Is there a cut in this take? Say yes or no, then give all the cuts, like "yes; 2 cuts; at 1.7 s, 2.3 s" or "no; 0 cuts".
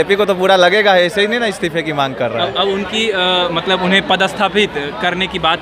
no; 0 cuts